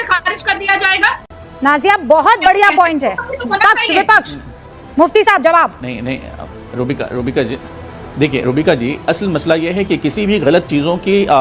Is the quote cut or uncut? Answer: uncut